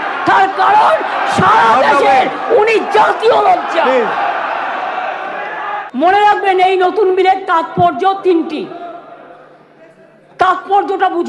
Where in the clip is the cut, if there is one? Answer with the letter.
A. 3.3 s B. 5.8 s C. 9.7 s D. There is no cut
B